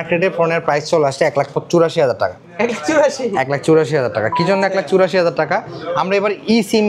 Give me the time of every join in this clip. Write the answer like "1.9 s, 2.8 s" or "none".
none